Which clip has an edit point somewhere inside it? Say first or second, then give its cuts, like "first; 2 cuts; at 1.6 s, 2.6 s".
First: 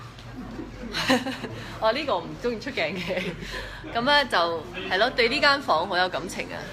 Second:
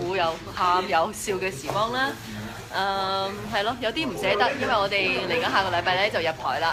first; 1 cut; at 3.8 s